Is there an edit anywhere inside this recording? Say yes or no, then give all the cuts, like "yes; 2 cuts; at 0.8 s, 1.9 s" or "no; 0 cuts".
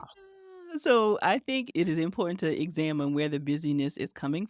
yes; 1 cut; at 1.7 s